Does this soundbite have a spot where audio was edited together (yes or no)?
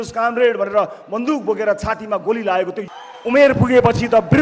yes